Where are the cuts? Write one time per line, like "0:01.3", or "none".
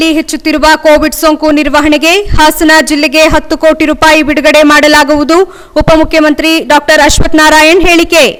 none